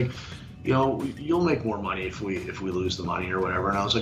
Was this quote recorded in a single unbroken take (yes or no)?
yes